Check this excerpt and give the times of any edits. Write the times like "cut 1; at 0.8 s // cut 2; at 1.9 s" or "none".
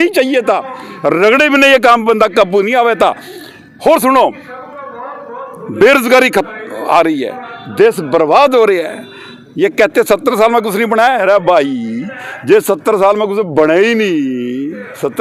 none